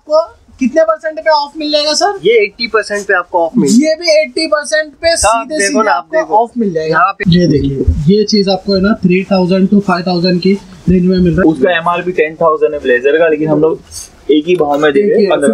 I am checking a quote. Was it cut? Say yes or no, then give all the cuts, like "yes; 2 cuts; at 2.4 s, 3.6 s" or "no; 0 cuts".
yes; 2 cuts; at 7.2 s, 11.4 s